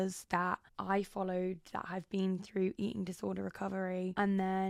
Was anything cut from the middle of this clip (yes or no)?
no